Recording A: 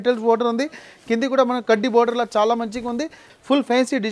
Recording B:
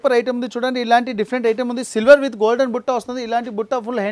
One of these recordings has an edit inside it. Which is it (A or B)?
A